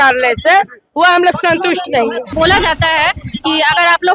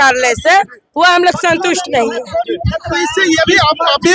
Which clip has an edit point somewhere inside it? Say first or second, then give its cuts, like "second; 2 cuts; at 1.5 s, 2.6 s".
first; 1 cut; at 2.3 s